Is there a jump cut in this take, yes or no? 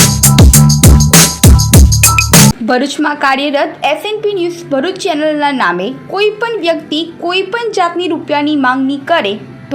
yes